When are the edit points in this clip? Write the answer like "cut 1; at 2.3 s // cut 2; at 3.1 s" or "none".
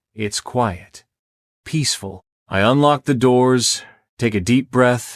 cut 1; at 2.3 s